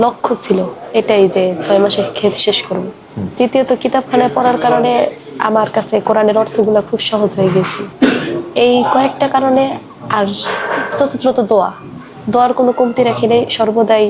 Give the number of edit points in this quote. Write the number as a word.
zero